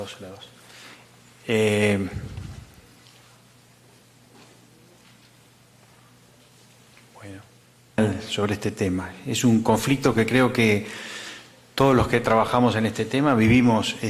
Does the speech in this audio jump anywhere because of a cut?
yes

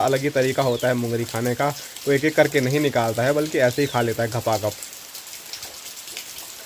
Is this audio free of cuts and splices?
yes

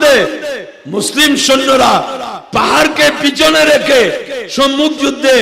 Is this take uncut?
yes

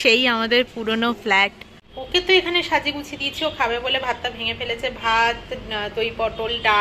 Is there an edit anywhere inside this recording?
yes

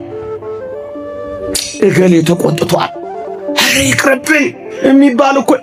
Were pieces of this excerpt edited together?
no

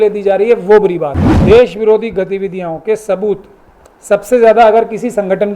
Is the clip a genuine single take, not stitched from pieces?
no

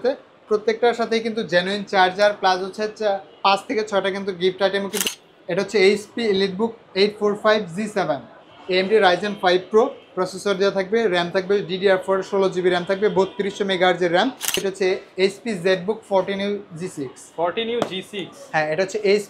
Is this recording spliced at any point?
yes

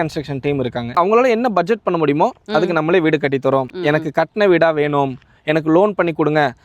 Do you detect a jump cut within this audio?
yes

